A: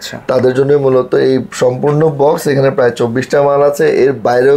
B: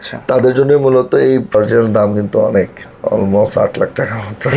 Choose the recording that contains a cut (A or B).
B